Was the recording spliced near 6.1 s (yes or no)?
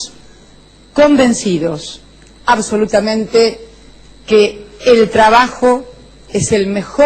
no